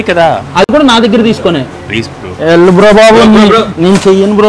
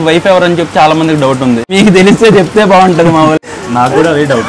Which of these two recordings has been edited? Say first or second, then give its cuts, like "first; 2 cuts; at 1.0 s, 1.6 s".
second; 2 cuts; at 1.7 s, 3.4 s